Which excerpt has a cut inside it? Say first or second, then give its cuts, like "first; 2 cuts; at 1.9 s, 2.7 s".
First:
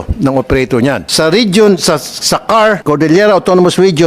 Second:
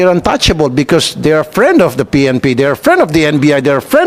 first; 2 cuts; at 1.1 s, 2.8 s